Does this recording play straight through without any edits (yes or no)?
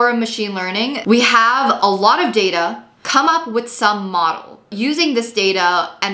no